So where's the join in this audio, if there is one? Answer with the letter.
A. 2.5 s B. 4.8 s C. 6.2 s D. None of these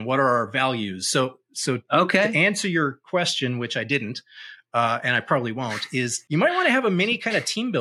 C